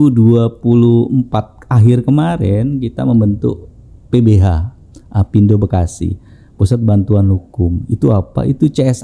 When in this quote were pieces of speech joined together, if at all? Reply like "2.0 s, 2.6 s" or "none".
none